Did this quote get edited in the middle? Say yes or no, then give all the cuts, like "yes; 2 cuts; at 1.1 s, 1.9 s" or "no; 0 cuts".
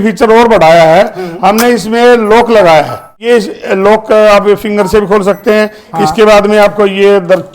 yes; 1 cut; at 3.2 s